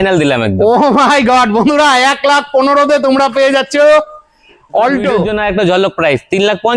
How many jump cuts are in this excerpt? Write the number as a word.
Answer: one